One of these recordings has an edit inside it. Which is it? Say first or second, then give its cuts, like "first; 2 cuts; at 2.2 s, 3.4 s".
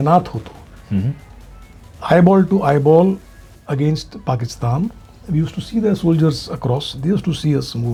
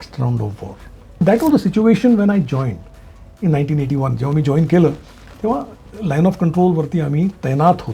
second; 1 cut; at 1.2 s